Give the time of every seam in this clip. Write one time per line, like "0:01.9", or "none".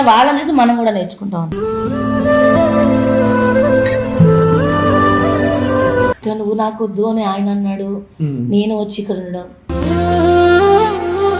0:06.2